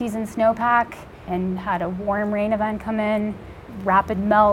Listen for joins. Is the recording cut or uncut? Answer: cut